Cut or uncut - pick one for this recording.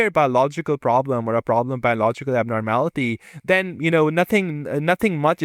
uncut